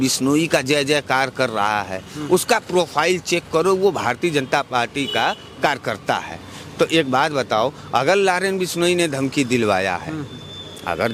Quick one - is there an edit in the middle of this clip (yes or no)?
no